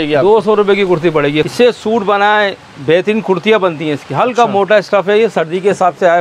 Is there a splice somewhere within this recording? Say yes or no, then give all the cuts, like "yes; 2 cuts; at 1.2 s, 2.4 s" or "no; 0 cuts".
yes; 1 cut; at 1.5 s